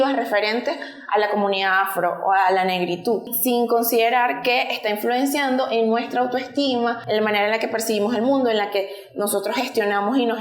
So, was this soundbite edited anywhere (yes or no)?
yes